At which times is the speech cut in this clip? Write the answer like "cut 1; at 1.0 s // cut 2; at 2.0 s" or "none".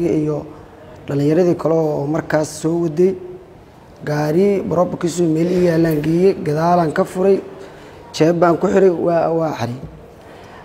none